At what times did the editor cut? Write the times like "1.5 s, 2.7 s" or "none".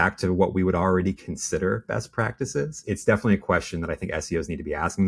2.8 s